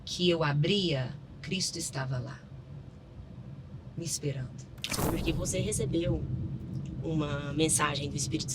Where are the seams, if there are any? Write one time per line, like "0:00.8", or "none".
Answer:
0:05.0